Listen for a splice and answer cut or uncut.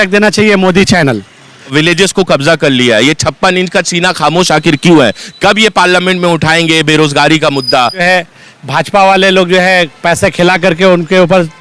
cut